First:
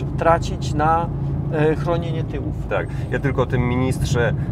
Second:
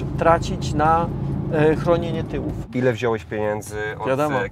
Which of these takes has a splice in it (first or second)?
second